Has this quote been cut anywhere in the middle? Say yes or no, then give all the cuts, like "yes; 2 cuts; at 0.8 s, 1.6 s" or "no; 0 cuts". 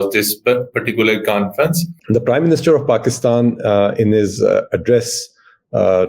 yes; 1 cut; at 1.9 s